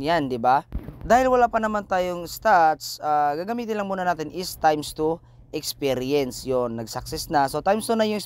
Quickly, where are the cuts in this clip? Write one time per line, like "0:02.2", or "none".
none